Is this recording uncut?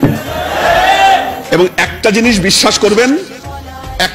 yes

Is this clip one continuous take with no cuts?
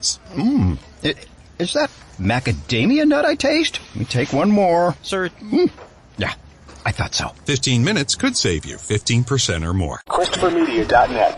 no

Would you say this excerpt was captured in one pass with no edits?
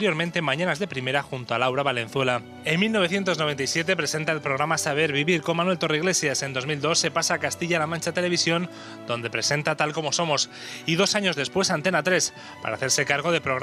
no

